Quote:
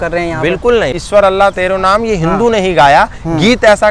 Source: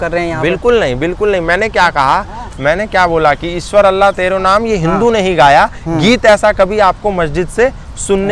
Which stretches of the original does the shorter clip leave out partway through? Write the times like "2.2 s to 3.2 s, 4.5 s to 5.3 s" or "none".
1.0 s to 3.6 s